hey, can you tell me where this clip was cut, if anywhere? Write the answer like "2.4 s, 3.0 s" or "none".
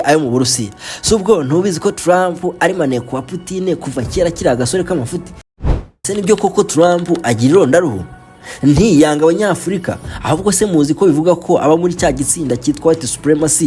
5.6 s